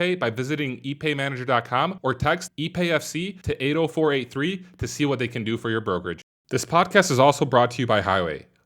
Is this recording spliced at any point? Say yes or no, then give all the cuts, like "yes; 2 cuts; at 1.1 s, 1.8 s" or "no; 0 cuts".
yes; 1 cut; at 6.3 s